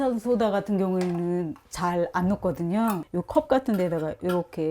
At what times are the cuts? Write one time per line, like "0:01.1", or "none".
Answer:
0:03.1